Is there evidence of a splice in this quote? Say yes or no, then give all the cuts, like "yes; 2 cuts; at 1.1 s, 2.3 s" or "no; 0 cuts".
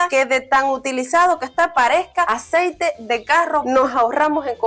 yes; 1 cut; at 3.6 s